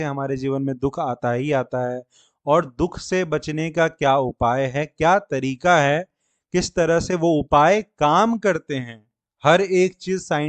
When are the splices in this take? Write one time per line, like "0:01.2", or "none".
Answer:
none